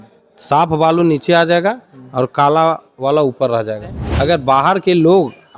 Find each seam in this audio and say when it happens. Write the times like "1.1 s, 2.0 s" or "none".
4.0 s